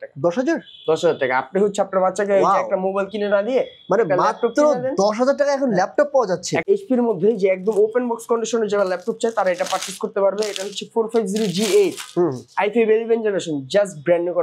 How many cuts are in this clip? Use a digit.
1